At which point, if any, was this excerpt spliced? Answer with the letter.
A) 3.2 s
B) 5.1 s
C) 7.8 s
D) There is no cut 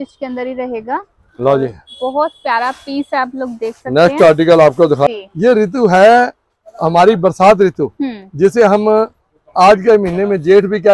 B